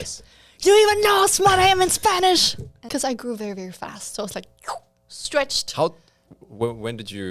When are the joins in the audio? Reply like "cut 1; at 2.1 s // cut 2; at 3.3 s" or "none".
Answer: cut 1; at 2.8 s